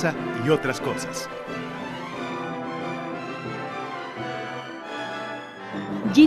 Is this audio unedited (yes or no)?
yes